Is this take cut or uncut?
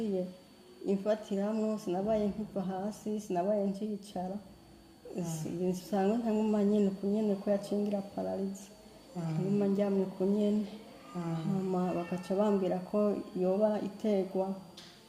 uncut